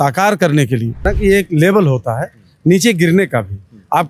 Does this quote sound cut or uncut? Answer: cut